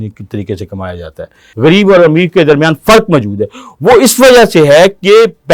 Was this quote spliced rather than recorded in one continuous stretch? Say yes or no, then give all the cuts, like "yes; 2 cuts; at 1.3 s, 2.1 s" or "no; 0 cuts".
yes; 1 cut; at 1.4 s